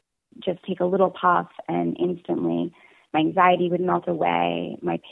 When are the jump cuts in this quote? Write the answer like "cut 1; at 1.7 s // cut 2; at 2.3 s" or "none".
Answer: none